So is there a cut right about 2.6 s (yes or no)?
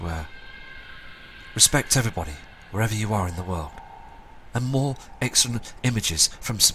no